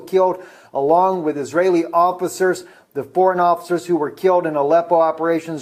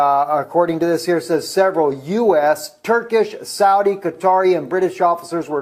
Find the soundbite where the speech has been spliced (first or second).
first